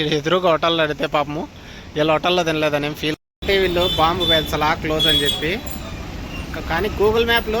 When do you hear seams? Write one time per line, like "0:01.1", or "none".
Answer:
0:03.1